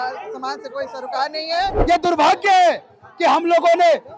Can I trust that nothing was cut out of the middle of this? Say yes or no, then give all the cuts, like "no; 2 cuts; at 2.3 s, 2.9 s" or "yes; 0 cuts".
no; 1 cut; at 1.8 s